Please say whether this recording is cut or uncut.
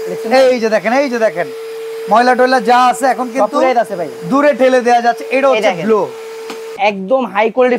cut